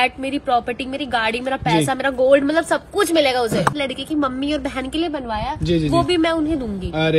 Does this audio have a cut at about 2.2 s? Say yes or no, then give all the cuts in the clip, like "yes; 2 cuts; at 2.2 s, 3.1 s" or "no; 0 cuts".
no; 1 cut; at 3.8 s